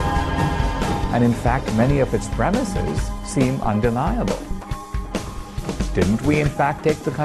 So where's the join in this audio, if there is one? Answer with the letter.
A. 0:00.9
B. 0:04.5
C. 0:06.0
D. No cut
D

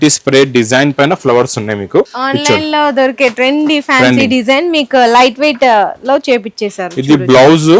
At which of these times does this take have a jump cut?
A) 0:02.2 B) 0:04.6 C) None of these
A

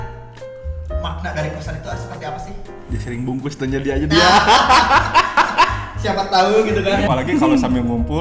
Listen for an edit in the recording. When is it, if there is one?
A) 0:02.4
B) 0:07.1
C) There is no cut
B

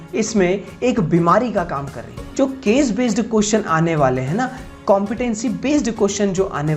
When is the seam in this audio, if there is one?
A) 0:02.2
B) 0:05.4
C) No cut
A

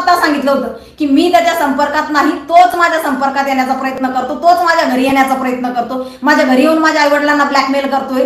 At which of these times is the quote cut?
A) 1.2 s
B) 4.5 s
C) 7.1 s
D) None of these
D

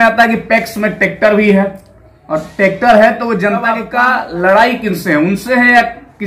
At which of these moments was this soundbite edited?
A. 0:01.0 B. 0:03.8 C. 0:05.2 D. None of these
B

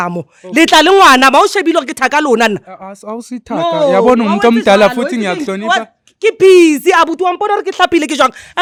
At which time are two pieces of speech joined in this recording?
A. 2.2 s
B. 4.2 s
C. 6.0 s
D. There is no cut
D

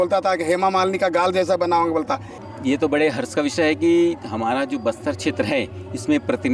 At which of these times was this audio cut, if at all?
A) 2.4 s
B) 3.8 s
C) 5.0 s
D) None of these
A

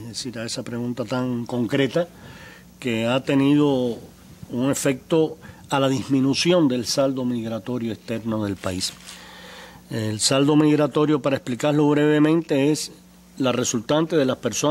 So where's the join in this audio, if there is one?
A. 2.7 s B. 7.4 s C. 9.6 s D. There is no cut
B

